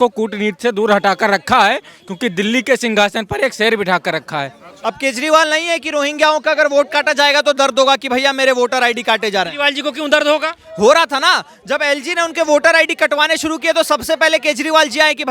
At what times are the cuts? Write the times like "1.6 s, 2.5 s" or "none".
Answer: 4.7 s